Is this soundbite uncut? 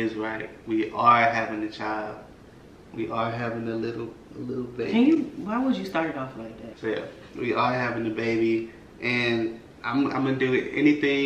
yes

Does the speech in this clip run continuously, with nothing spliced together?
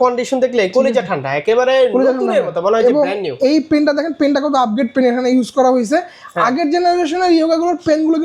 yes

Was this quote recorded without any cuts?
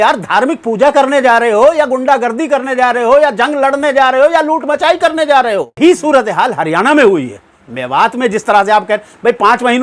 no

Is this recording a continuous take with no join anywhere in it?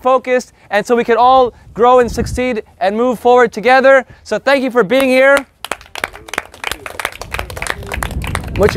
yes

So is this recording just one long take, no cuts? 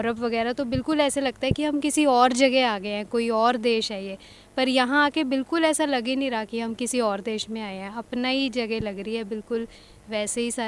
yes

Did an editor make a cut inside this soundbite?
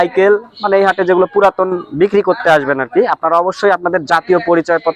no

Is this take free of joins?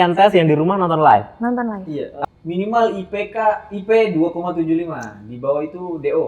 no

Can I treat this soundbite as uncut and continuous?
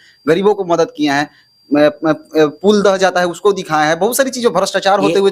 yes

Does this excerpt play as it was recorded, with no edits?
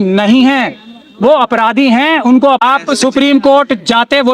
no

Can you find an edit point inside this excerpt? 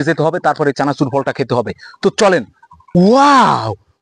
no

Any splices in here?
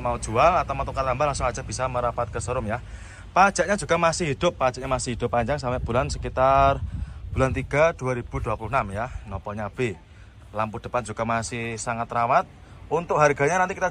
no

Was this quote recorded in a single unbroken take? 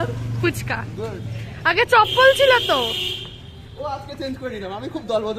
yes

